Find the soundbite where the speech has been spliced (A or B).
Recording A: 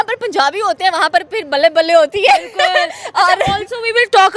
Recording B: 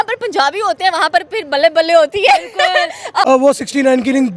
B